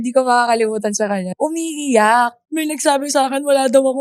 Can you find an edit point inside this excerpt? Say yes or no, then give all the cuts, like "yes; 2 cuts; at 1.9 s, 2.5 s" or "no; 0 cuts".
yes; 2 cuts; at 1.3 s, 2.4 s